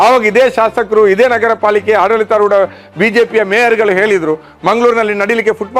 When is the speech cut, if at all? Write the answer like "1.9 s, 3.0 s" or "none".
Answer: 4.5 s